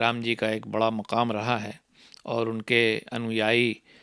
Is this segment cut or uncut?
uncut